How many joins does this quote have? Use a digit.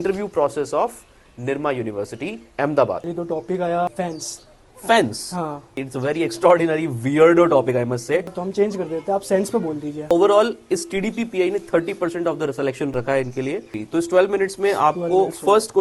6